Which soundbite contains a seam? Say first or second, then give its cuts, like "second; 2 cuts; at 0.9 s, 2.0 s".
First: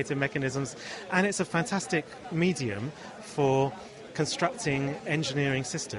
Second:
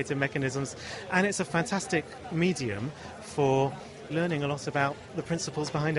second; 1 cut; at 4.1 s